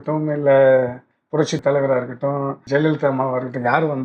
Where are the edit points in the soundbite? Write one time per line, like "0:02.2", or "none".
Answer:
0:01.5
0:02.6